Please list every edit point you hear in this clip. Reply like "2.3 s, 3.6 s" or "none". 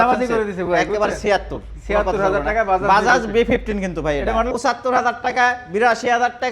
4.5 s